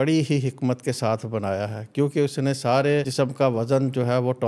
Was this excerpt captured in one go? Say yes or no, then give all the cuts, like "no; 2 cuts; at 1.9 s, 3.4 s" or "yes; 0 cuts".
no; 1 cut; at 3.1 s